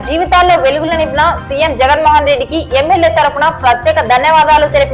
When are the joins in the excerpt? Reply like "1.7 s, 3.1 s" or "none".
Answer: none